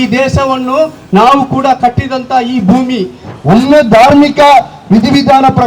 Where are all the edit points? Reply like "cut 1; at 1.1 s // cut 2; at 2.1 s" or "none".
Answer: cut 1; at 3.3 s